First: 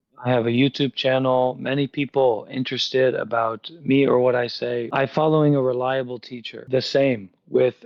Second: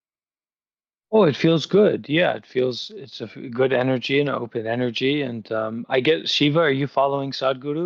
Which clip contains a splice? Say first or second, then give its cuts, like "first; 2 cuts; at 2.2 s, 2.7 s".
first; 2 cuts; at 4.9 s, 6.6 s